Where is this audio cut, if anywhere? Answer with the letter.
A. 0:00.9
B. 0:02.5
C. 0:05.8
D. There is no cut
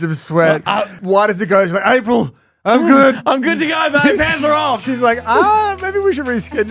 A